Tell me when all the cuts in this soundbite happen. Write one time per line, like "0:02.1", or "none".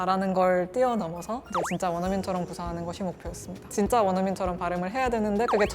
0:03.7